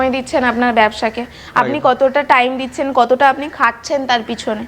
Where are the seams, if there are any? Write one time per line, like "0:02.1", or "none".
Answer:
none